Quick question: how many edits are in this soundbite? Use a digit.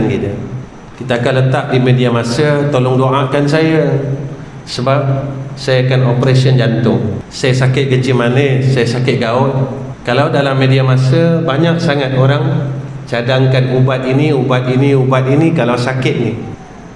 2